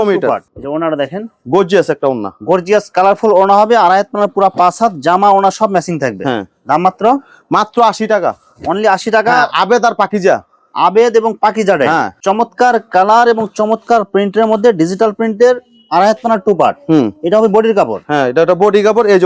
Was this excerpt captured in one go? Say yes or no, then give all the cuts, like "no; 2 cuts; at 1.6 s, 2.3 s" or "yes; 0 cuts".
yes; 0 cuts